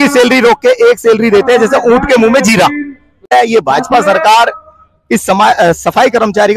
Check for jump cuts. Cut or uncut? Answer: cut